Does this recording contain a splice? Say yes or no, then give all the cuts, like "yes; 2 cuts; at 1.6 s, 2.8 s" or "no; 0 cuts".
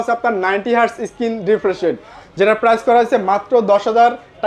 no; 0 cuts